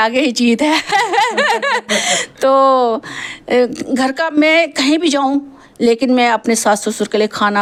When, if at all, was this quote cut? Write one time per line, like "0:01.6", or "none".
none